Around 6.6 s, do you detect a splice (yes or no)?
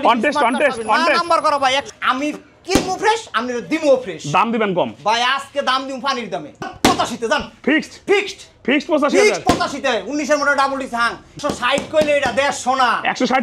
yes